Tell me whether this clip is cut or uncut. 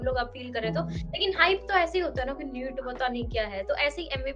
uncut